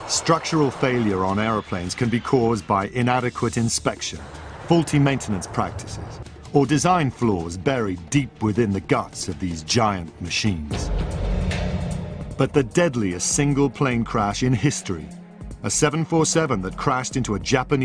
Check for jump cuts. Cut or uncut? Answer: cut